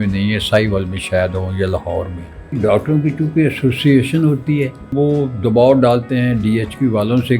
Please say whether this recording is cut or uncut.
cut